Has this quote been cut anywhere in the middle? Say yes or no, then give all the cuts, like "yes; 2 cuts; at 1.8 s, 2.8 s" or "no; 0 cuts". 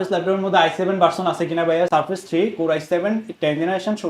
yes; 1 cut; at 1.9 s